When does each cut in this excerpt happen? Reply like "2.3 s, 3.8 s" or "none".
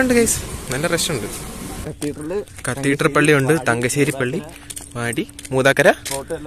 1.7 s